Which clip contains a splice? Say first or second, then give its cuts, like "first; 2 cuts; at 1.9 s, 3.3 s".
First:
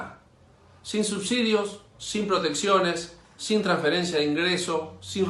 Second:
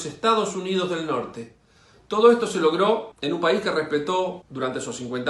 second; 2 cuts; at 3.1 s, 4.4 s